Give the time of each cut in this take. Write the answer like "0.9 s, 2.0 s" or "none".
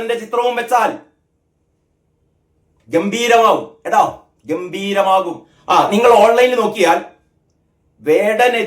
5.5 s